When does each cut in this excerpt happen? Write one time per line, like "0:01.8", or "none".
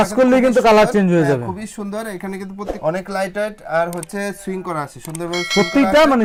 none